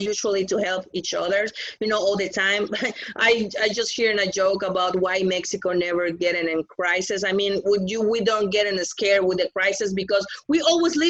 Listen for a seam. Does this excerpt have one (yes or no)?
no